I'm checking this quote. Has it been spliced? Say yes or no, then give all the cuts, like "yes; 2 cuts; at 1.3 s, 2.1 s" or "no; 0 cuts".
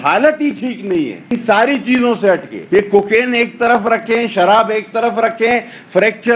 yes; 2 cuts; at 1.3 s, 2.5 s